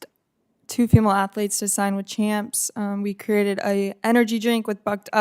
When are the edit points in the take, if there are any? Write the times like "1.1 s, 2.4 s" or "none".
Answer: none